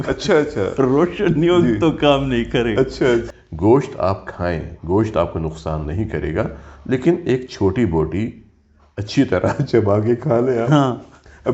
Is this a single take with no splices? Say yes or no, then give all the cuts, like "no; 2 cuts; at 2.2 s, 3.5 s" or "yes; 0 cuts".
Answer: no; 1 cut; at 3.3 s